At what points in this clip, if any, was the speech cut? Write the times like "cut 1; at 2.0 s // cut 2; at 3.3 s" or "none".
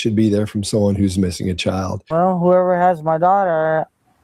cut 1; at 2.0 s